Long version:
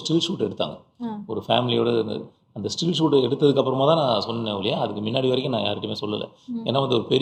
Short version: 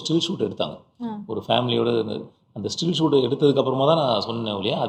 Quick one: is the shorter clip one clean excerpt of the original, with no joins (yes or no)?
yes